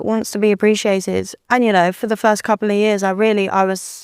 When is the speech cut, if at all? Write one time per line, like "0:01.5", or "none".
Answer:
0:01.3

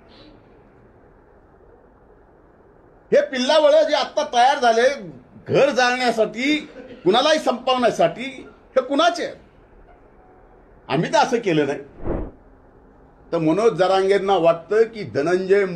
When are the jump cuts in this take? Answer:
0:12.1

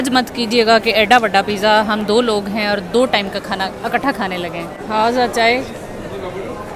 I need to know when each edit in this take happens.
0:04.8

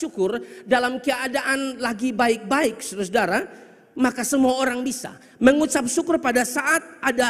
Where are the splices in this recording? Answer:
none

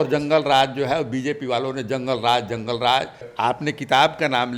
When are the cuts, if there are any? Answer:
0:03.3

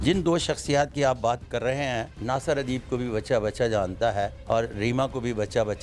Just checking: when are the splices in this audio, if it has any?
0:02.1
0:04.4

